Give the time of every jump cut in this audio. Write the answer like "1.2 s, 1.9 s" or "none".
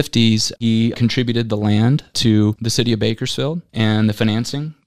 3.6 s